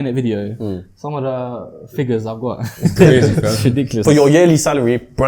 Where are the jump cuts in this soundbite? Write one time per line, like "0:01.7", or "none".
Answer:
0:04.0